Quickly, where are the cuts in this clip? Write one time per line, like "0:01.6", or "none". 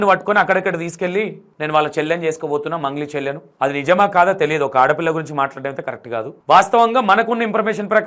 none